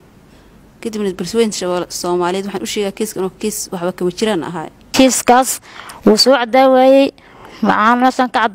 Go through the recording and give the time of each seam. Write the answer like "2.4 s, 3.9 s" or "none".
4.9 s

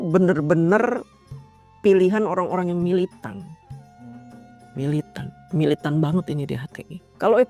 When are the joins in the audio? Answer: none

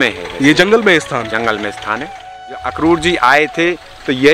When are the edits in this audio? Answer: 2.6 s

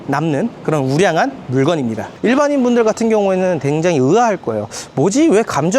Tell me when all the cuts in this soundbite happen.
2.0 s

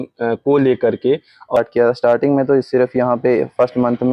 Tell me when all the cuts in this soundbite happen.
1.6 s

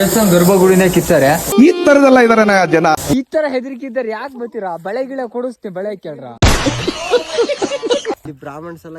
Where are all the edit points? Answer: 3.1 s, 8.2 s

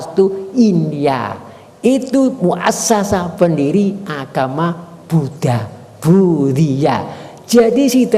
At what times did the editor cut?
none

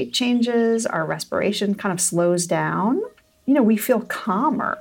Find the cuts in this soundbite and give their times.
3.4 s

